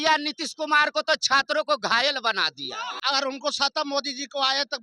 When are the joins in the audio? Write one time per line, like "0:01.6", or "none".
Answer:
0:02.9